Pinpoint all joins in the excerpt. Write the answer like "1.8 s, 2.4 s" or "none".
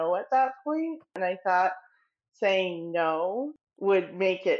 1.1 s, 3.6 s